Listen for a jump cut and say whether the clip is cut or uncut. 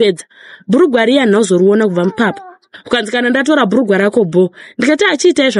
cut